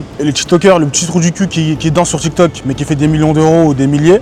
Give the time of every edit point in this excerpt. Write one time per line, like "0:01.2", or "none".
none